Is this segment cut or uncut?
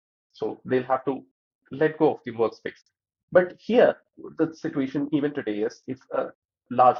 uncut